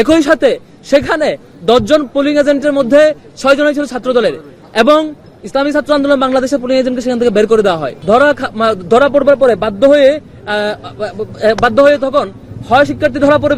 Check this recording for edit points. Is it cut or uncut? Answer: cut